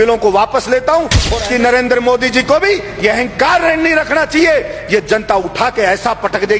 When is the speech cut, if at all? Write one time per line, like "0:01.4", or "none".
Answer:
0:01.3